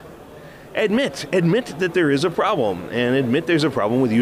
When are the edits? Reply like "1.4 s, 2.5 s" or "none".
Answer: none